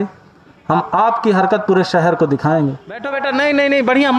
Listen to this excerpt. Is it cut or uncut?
cut